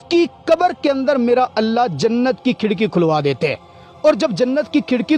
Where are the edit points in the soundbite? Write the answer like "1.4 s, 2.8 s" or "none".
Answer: none